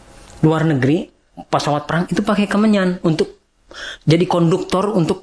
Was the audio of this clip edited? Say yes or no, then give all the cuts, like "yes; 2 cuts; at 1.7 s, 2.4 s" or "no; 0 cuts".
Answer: no; 0 cuts